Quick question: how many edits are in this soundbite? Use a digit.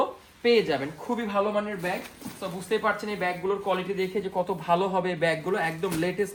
0